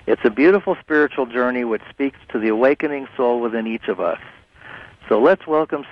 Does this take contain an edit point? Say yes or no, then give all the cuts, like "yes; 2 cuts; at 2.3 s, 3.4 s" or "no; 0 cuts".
no; 0 cuts